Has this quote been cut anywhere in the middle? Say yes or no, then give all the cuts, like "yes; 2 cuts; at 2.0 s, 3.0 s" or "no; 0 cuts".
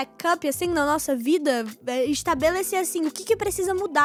no; 0 cuts